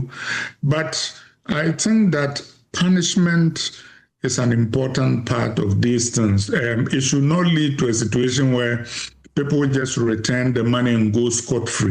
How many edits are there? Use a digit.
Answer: 0